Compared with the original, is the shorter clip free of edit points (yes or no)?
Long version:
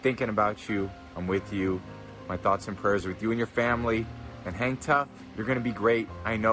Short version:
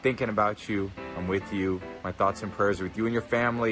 no